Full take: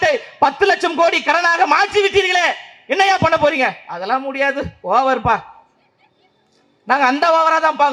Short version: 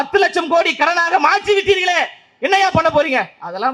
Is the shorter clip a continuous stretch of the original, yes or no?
yes